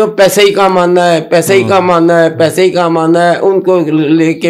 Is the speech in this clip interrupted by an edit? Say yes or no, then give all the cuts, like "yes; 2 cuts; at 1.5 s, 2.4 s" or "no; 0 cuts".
no; 0 cuts